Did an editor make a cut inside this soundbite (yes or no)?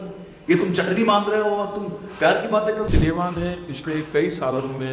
yes